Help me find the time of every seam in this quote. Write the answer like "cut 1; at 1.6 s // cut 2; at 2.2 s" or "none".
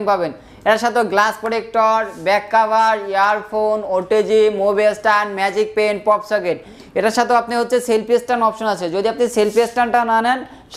none